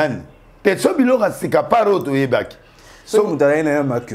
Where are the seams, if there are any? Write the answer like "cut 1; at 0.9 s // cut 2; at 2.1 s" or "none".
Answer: none